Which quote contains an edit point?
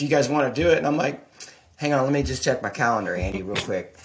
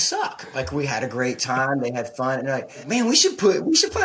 second; 1 cut; at 2.8 s

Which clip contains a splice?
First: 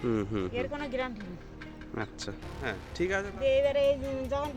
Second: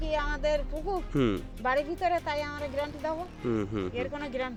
first; 1 cut; at 2.9 s

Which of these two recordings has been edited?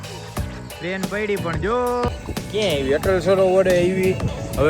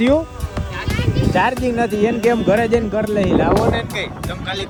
first; 1 cut; at 2.1 s

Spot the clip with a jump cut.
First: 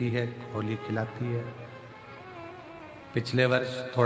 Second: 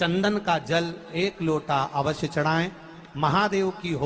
first; 1 cut; at 0.9 s

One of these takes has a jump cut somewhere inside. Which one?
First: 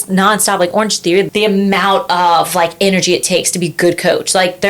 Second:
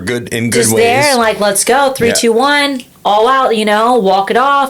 first; 1 cut; at 1.3 s

